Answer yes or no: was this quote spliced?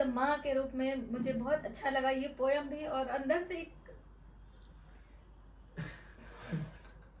no